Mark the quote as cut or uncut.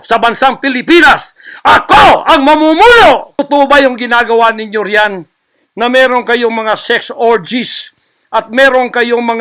cut